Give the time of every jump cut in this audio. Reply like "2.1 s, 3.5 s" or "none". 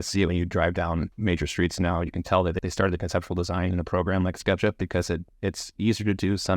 1.1 s, 2.6 s

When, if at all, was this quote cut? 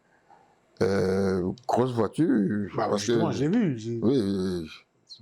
none

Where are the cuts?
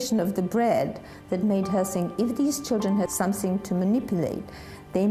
3.1 s

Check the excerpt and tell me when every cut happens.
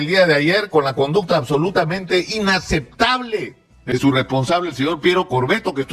3.9 s

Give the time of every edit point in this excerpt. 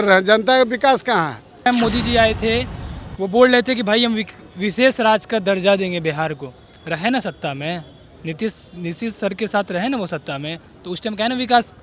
1.7 s

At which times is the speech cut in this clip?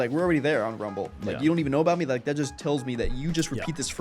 none

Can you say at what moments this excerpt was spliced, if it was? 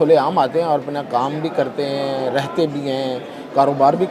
none

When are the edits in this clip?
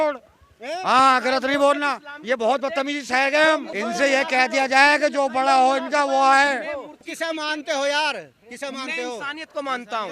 3.7 s, 7.1 s

